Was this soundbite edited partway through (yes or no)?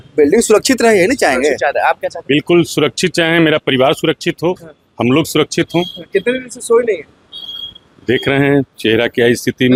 no